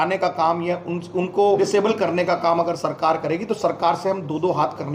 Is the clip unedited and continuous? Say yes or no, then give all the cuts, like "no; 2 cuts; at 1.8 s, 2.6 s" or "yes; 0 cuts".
no; 1 cut; at 1.6 s